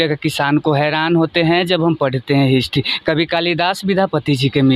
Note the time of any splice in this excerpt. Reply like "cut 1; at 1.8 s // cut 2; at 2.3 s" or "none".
none